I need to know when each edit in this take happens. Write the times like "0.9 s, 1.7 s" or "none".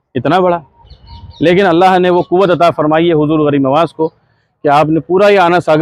none